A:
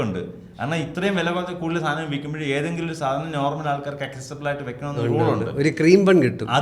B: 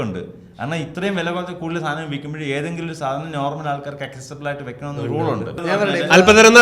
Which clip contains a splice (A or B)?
B